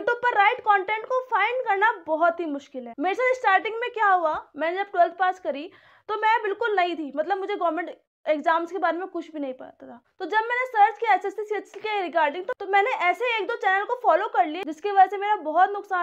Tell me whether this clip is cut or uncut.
uncut